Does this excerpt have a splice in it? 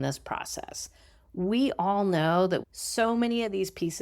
yes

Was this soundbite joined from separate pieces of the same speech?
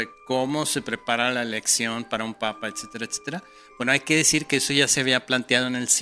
no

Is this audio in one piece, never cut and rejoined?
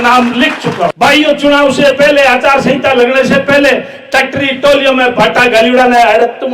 no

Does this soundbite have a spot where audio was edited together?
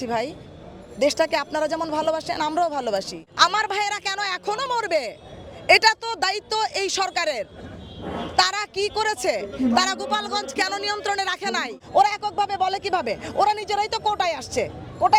yes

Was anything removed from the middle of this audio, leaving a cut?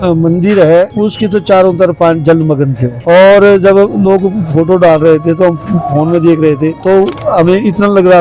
yes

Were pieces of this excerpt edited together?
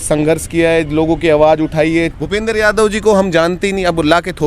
yes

